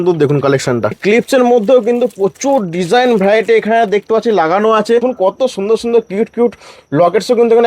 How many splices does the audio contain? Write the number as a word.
two